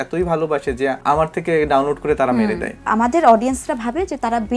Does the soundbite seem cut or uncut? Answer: cut